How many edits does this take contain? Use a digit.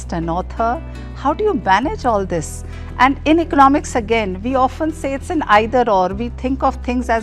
0